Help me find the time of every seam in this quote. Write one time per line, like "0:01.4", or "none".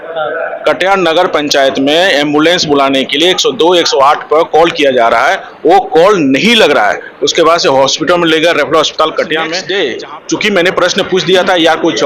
0:09.6